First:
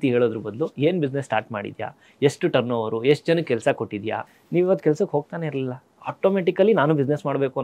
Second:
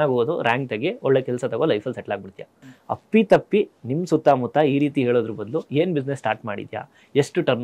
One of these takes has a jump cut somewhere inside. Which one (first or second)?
first